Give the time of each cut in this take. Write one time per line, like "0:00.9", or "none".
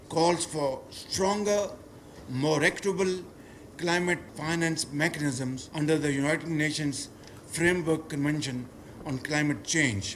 0:04.3
0:05.6

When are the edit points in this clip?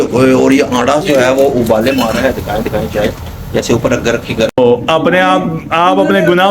0:04.6

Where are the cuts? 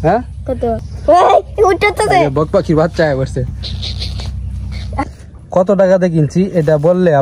0:00.8
0:05.1

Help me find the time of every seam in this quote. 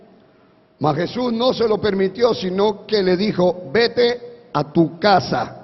0:04.7

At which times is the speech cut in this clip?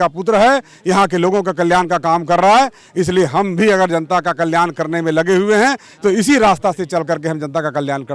none

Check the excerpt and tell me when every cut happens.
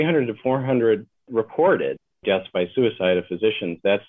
0:01.2
0:02.1

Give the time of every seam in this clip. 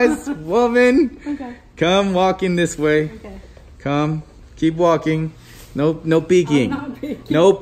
none

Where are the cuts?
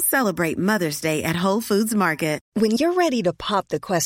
0:02.4

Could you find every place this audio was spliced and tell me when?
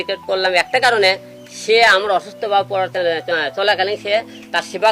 none

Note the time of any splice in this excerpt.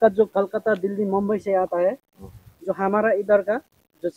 none

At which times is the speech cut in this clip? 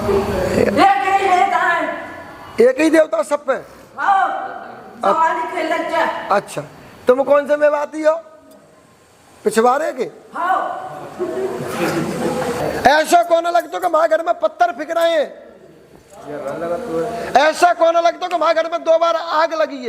0:12.6

